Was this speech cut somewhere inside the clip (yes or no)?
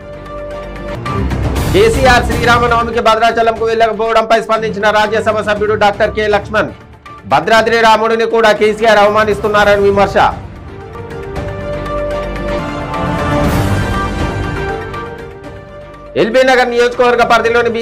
yes